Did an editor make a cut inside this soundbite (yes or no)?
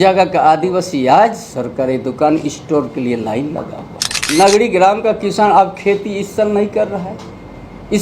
yes